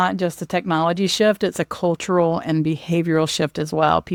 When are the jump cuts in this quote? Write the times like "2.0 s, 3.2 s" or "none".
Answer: none

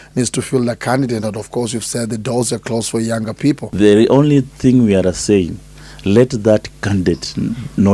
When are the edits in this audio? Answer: 3.7 s

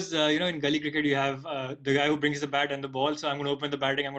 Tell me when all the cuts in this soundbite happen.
none

